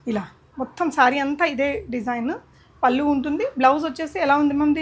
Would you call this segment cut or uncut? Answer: uncut